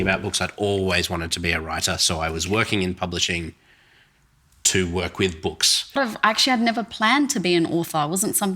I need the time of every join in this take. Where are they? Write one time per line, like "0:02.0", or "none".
0:06.0